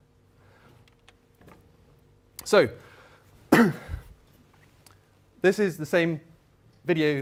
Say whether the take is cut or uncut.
uncut